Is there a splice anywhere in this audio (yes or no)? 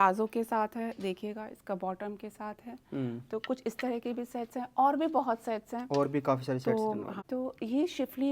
yes